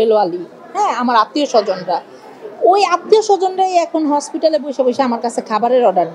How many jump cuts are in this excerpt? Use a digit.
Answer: 0